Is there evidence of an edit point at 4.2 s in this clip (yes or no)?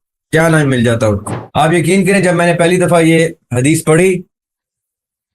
no